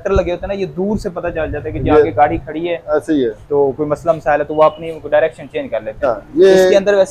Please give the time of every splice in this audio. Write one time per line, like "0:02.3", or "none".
0:06.1

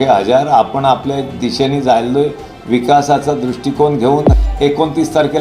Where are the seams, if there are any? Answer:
0:04.3

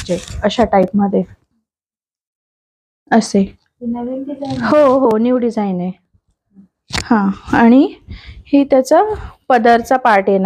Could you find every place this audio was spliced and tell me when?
none

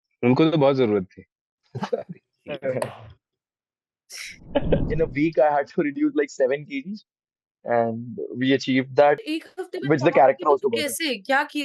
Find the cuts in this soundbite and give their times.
0:04.9
0:09.3

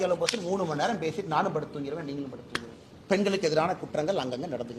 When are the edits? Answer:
none

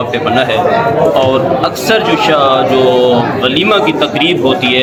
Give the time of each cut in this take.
none

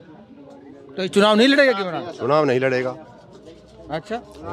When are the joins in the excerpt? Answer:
none

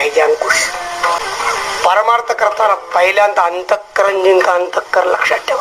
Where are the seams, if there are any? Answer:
0:01.2

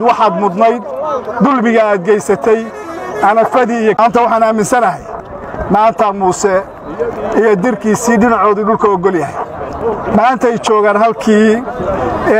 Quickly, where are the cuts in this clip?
0:04.0

